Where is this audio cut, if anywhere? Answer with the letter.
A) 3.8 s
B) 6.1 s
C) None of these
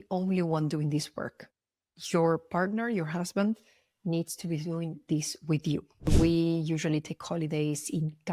B